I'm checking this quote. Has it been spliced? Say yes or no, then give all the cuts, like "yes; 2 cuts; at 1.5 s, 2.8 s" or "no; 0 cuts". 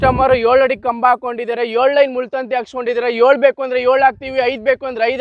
no; 0 cuts